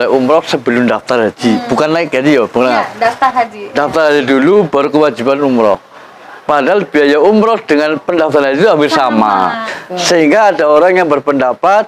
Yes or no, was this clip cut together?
yes